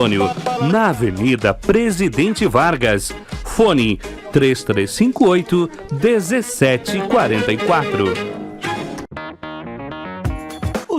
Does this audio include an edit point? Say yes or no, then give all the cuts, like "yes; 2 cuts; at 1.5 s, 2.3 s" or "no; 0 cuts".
yes; 1 cut; at 9.1 s